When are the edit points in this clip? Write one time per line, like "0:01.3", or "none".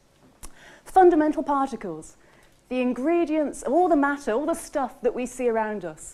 none